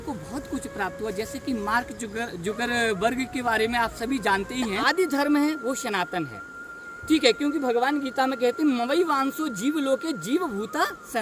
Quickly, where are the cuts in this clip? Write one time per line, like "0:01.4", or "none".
0:04.8